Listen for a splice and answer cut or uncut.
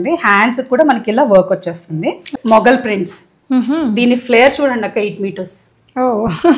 cut